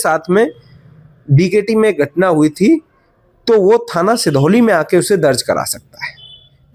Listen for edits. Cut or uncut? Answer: uncut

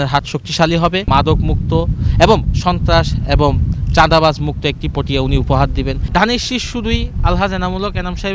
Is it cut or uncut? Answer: cut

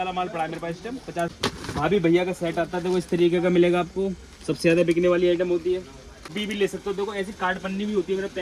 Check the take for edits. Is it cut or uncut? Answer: cut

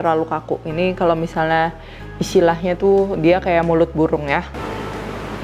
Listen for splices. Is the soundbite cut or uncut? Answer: cut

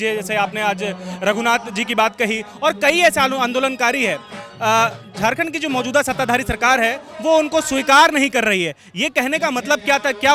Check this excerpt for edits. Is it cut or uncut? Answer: uncut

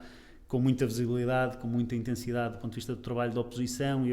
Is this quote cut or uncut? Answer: uncut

